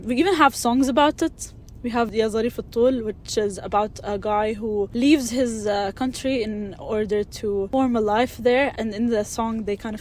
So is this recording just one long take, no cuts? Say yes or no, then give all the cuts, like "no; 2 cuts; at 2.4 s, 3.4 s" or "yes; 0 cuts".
no; 4 cuts; at 2.1 s, 4.9 s, 7.7 s, 8.8 s